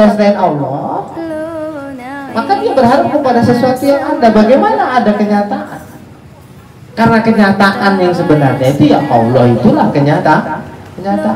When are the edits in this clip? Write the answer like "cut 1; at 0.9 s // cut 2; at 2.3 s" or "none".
none